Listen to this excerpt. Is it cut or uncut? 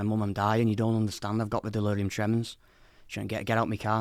uncut